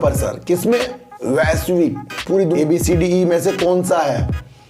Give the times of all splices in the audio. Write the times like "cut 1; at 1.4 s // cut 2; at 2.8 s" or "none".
cut 1; at 2.5 s